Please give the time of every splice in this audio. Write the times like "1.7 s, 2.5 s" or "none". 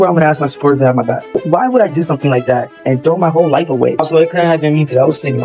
1.3 s, 4.0 s